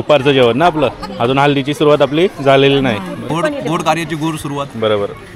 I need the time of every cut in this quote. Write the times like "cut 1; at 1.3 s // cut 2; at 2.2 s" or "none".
cut 1; at 3.2 s